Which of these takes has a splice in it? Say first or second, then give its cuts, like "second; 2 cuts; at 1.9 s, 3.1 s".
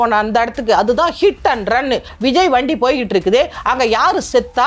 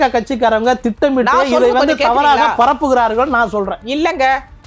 first; 1 cut; at 2.1 s